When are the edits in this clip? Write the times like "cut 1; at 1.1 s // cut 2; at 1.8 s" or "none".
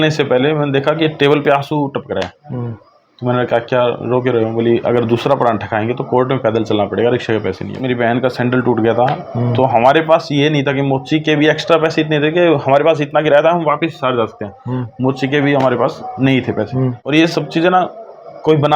cut 1; at 7.7 s // cut 2; at 17.0 s